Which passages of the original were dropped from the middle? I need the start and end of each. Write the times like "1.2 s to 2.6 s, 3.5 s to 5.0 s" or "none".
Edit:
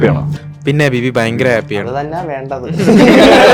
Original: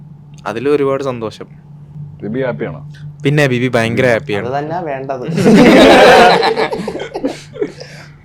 none